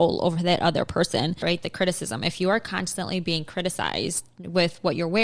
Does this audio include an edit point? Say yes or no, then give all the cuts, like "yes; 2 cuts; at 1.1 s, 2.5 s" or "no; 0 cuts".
yes; 1 cut; at 1.4 s